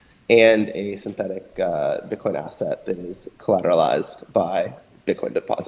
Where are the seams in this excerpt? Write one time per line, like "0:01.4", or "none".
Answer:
none